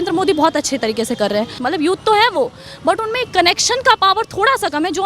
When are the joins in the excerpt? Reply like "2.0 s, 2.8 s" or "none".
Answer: 1.5 s